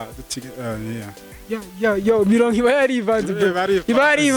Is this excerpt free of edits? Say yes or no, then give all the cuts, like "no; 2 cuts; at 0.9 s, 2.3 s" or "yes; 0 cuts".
yes; 0 cuts